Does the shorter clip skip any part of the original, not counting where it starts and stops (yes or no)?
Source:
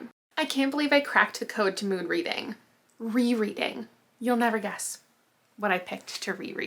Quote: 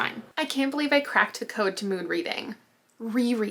no